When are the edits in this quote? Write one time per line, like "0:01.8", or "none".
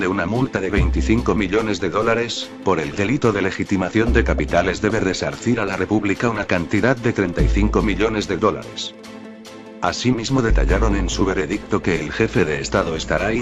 none